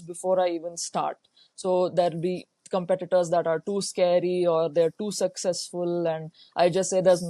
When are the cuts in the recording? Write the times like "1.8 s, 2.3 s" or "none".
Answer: none